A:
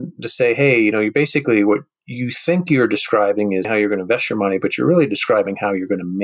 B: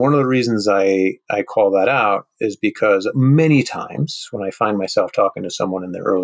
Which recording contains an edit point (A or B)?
A